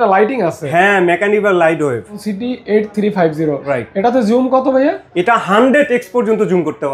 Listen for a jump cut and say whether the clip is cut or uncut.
cut